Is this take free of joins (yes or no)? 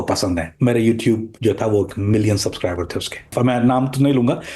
no